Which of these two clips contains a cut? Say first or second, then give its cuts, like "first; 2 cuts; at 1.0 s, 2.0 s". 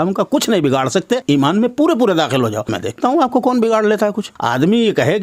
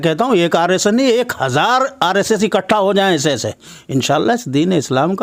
first; 3 cuts; at 1.2 s, 2.8 s, 4.3 s